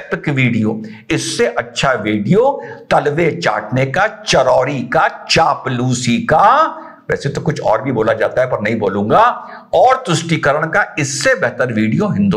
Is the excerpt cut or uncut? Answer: uncut